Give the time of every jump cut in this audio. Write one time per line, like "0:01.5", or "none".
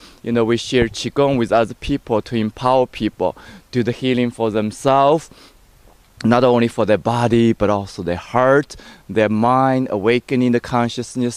none